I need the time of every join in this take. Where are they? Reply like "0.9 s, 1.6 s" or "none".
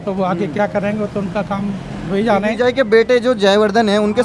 none